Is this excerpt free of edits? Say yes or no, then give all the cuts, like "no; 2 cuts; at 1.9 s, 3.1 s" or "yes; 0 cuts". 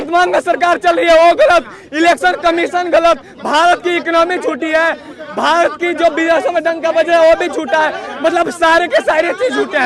yes; 0 cuts